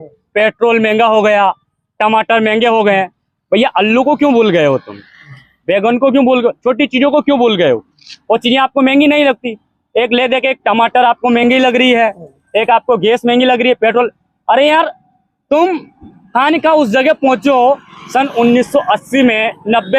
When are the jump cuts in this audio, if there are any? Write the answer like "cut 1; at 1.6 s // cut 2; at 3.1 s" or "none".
none